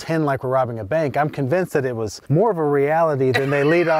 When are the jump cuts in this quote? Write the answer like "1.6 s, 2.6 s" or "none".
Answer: 2.2 s

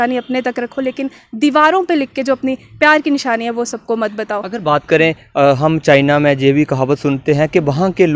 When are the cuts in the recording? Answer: none

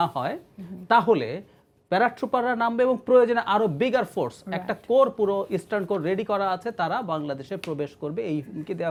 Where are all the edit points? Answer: none

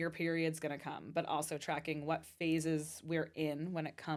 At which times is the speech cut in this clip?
none

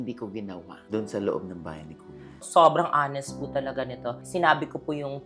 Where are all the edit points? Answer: 2.4 s, 4.2 s

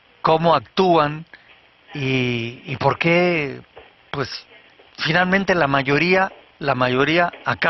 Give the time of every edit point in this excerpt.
none

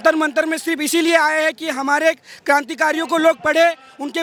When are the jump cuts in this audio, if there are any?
none

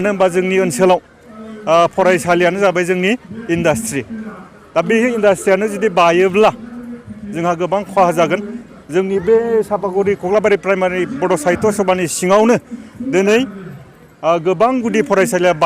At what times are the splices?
8.6 s

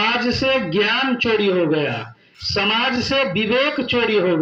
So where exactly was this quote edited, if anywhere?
none

